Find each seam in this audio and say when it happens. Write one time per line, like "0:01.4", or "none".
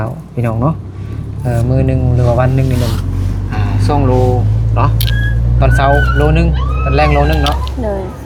none